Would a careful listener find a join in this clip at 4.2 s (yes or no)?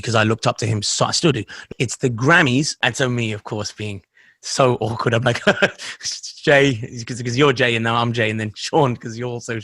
no